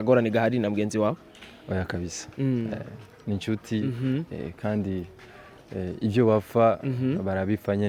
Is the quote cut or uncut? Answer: uncut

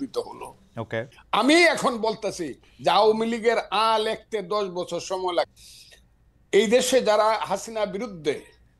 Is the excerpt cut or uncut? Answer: cut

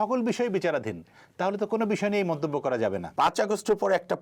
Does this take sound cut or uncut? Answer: cut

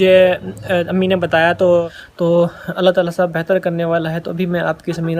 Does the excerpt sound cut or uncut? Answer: cut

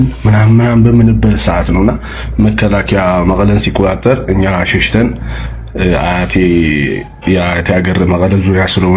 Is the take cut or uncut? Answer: uncut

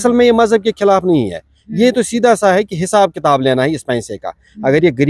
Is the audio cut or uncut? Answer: uncut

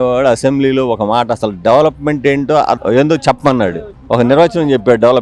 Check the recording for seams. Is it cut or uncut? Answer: cut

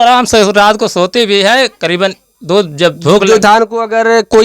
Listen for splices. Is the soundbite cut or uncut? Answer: cut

